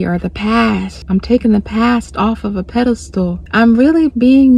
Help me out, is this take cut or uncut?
cut